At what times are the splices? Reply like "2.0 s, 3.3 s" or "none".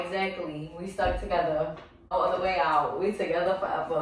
2.1 s